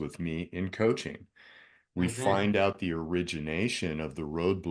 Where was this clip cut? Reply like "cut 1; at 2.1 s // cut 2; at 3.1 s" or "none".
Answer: none

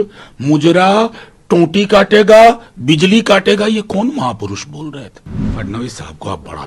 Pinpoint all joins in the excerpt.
cut 1; at 5.4 s

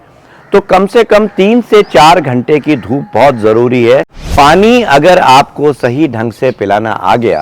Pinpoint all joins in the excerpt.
cut 1; at 4.2 s

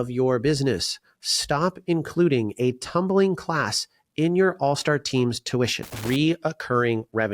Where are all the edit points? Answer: cut 1; at 5.9 s

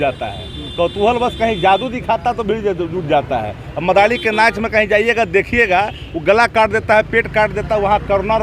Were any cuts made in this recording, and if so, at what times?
none

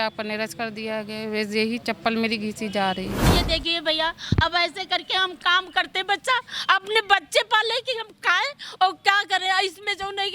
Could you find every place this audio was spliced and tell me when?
cut 1; at 3.3 s

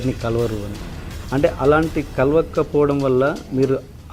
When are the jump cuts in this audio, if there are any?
none

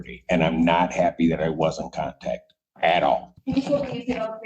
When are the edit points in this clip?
cut 1; at 3.3 s

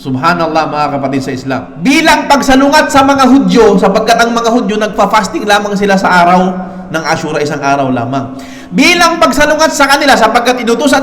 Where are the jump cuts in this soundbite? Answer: cut 1; at 1.7 s

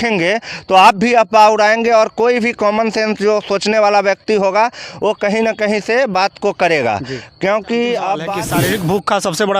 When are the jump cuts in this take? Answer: cut 1; at 8.3 s

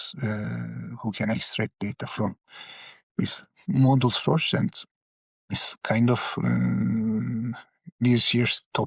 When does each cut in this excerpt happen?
none

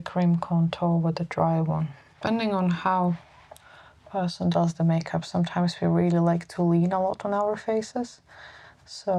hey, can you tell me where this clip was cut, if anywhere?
cut 1; at 2.0 s

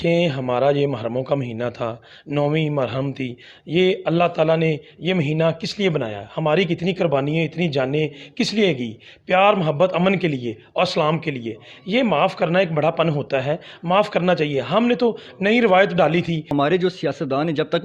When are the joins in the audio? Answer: cut 1; at 16.5 s

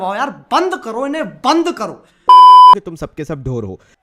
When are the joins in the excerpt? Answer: cut 1; at 2.8 s

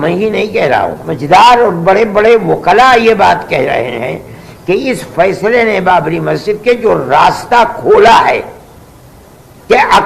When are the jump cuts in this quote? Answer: cut 1; at 1.0 s

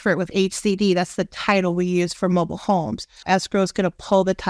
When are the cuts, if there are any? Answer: cut 1; at 3.2 s

